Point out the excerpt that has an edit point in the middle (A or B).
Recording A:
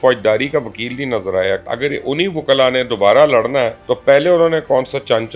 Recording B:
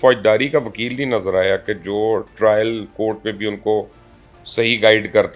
A